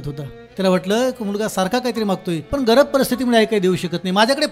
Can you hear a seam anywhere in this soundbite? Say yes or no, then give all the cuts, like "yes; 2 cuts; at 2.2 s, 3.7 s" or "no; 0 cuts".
yes; 1 cut; at 2.4 s